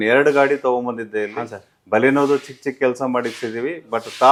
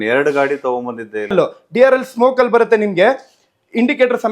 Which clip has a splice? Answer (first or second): second